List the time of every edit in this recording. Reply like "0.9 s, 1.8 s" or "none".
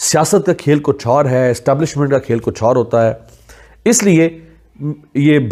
none